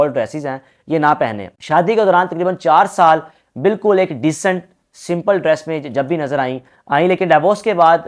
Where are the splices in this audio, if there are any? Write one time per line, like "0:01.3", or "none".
none